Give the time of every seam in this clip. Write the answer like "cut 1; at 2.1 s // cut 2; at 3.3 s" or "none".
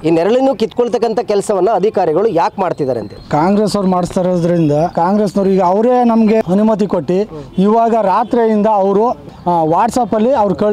cut 1; at 3.1 s // cut 2; at 4.9 s // cut 3; at 6.4 s // cut 4; at 9.3 s